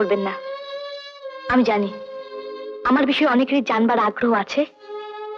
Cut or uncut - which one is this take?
uncut